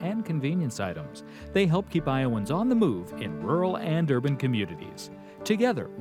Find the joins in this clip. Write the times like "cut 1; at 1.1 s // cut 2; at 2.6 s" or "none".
none